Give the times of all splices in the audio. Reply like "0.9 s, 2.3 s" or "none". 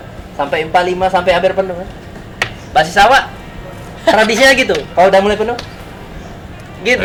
none